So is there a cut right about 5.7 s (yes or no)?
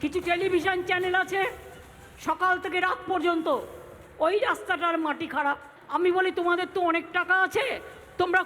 yes